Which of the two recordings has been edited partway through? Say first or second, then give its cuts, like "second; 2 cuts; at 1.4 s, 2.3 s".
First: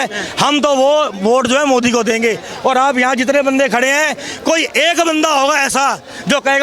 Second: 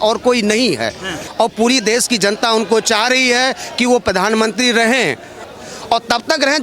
second; 2 cuts; at 1.2 s, 5.5 s